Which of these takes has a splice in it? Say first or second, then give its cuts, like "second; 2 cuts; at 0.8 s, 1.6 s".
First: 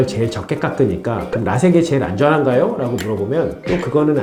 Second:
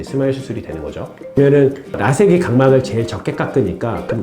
second; 1 cut; at 1.2 s